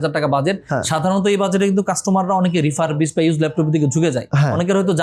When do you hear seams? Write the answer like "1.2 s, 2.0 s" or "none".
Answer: none